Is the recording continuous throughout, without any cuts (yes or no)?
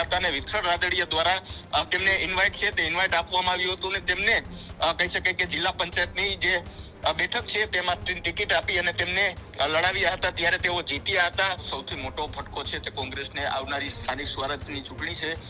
no